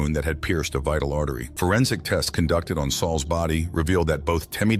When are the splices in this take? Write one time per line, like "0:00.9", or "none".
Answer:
0:01.5